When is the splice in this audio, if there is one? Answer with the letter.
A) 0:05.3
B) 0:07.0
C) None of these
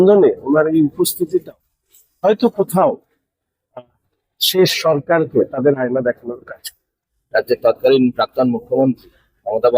B